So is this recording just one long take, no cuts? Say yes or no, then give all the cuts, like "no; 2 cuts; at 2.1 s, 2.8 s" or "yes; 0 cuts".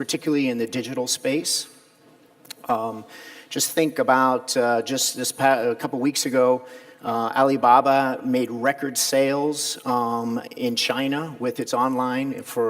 no; 1 cut; at 10.8 s